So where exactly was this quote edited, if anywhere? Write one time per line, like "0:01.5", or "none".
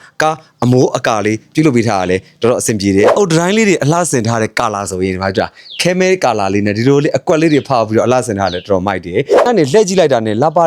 0:03.1
0:09.5